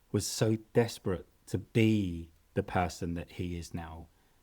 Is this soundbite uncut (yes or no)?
no